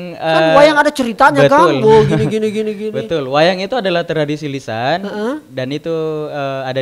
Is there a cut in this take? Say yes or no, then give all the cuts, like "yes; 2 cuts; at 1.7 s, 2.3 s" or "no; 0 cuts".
no; 0 cuts